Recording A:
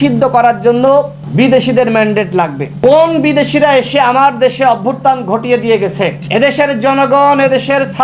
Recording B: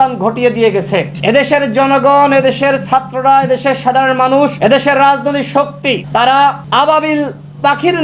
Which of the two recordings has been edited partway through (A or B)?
B